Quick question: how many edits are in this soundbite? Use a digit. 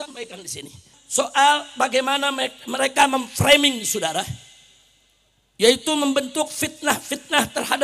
1